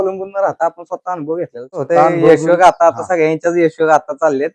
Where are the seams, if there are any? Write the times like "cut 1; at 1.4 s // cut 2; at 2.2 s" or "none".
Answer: cut 1; at 1.9 s